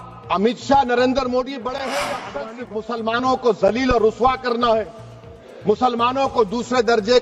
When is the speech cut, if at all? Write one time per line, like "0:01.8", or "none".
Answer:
0:02.4

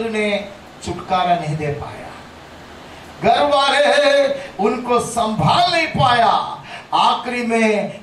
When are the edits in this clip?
none

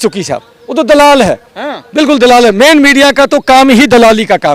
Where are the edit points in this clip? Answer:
none

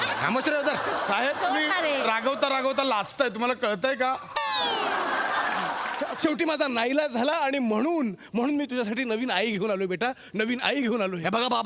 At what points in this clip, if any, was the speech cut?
0:06.1

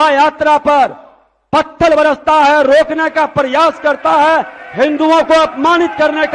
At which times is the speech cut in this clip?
none

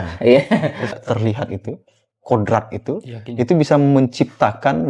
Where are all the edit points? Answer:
0:00.9

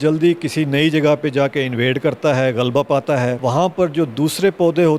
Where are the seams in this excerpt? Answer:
none

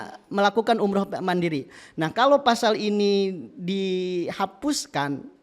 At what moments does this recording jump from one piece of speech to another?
none

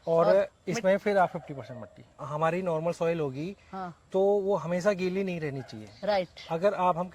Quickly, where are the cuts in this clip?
0:02.2

